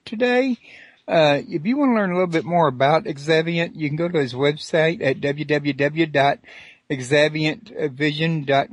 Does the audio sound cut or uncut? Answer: uncut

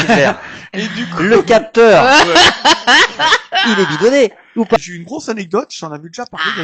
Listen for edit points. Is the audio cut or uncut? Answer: cut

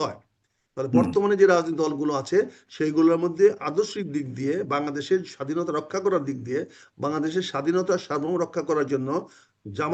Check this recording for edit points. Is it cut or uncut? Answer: uncut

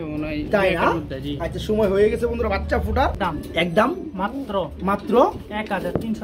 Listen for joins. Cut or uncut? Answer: cut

